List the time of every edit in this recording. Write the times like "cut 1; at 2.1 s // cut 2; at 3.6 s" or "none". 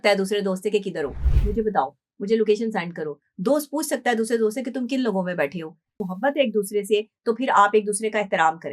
cut 1; at 6.0 s